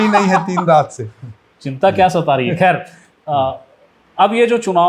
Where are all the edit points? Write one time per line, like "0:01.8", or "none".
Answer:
none